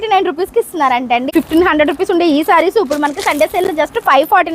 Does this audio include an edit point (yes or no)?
yes